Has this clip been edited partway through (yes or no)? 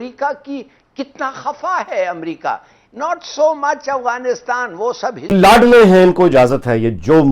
yes